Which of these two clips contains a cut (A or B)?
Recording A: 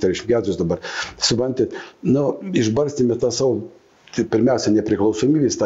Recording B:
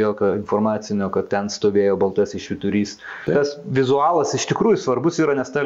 B